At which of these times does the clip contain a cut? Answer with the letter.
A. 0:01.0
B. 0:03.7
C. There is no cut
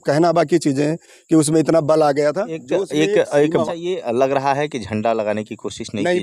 B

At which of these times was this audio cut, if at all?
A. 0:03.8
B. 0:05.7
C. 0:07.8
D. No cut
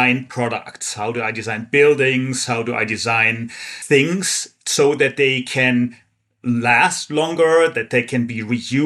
A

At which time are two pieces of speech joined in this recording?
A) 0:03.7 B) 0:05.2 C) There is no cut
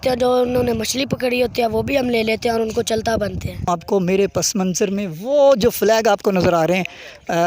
A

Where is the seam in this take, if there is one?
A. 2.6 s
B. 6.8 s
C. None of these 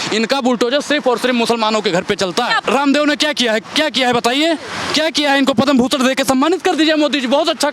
A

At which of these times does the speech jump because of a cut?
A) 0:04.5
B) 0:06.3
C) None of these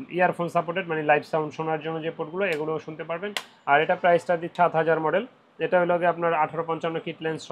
A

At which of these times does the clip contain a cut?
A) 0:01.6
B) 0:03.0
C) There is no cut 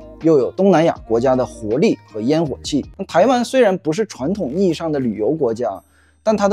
B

